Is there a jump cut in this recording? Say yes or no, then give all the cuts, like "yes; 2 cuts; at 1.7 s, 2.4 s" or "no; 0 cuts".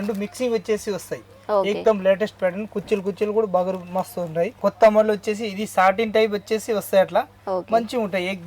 yes; 1 cut; at 4.5 s